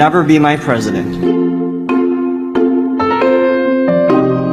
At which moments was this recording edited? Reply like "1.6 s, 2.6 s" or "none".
none